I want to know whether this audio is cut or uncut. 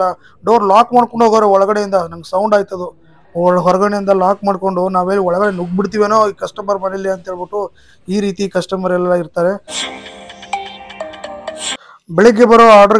cut